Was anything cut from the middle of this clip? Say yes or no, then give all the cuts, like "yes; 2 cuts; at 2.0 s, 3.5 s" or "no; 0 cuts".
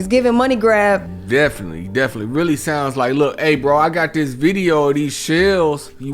yes; 1 cut; at 1.1 s